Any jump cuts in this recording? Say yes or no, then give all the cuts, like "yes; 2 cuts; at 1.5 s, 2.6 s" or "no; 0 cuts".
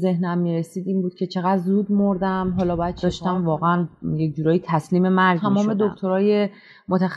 yes; 2 cuts; at 3.0 s, 5.4 s